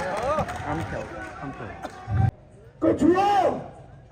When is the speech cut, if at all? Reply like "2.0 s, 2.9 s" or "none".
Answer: 2.4 s